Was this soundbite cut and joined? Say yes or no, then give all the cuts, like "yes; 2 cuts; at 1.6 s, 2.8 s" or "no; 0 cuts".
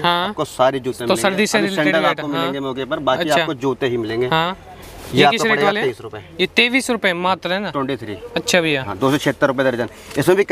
no; 0 cuts